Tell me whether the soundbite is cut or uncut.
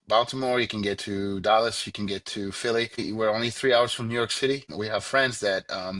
cut